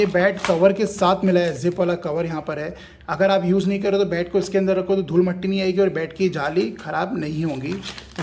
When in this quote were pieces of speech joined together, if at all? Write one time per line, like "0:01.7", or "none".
none

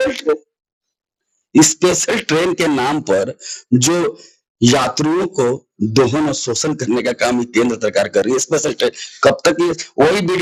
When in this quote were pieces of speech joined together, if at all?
none

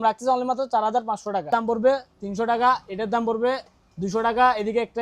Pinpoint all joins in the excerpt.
0:01.5

